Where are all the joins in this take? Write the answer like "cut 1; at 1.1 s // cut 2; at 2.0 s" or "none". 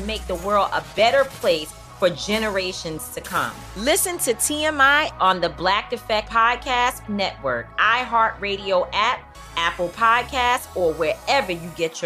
none